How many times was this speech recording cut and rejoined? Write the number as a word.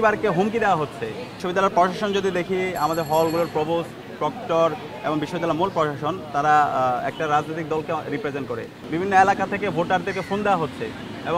two